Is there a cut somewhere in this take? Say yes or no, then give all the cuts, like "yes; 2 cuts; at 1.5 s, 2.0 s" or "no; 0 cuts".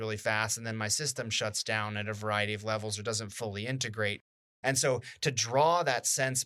no; 0 cuts